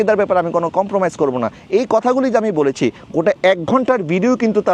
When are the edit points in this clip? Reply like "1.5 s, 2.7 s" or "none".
none